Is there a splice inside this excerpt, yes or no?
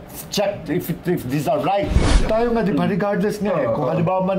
yes